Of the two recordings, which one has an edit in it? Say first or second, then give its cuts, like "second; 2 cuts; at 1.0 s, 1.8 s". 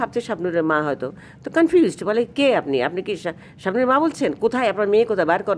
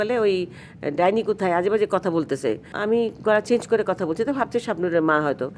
second; 1 cut; at 2.7 s